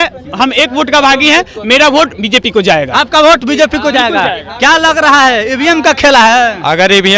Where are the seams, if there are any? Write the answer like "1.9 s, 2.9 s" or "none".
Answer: none